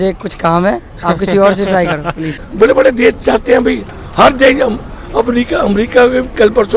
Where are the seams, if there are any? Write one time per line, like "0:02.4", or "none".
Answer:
0:02.3